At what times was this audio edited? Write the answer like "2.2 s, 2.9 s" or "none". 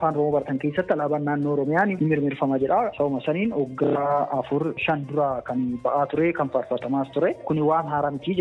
2.0 s, 4.8 s

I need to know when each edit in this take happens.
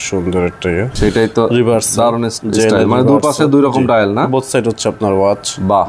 0.9 s, 2.3 s

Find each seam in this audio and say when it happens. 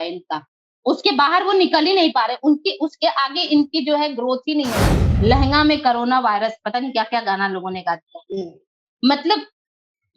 5.0 s

